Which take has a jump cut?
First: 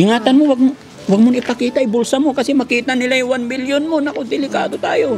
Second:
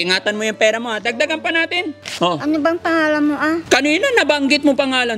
second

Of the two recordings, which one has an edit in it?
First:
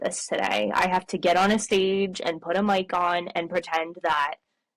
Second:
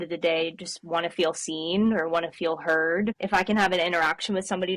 second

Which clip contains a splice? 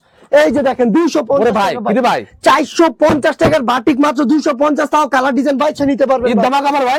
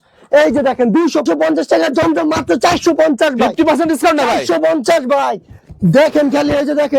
second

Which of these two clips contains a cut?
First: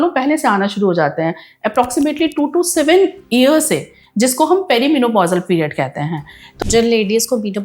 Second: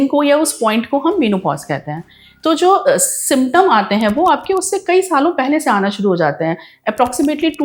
first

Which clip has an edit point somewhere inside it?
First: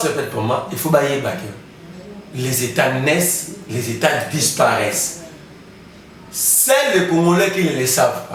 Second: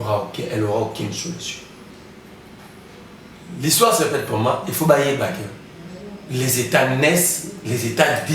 second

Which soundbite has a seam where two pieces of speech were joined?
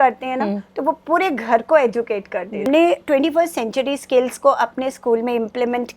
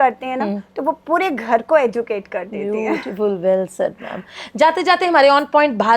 first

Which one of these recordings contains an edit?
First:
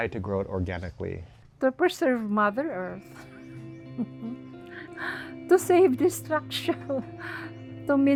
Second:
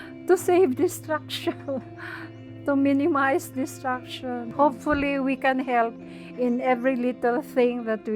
second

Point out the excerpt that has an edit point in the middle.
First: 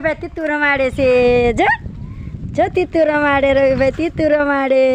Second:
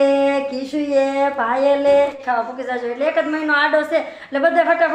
second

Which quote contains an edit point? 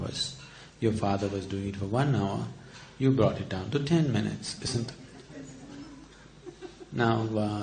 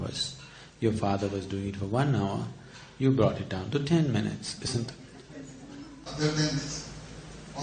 first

